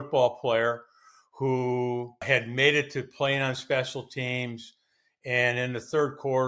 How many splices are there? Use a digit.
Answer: 1